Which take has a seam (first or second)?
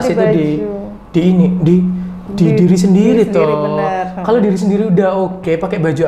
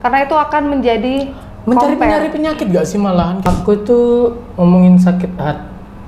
second